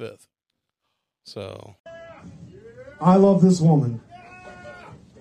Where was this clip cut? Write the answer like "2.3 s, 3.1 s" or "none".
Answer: 1.7 s